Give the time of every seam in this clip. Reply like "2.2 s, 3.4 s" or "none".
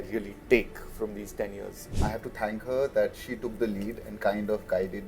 1.9 s